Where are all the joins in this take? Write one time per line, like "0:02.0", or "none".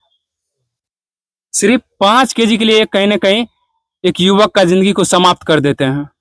none

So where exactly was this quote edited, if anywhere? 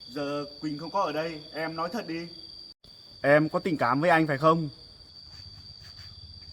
none

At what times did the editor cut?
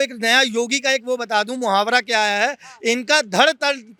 none

